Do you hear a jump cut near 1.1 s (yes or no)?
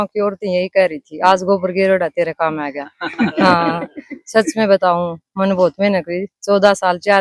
no